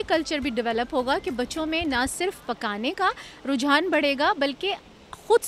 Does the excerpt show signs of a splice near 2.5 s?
no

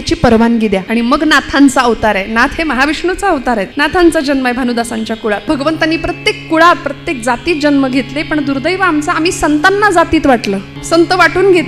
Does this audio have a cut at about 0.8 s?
yes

